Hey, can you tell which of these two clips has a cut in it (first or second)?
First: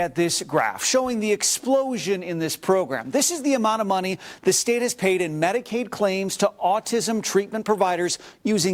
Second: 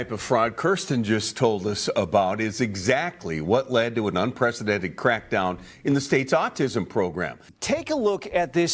second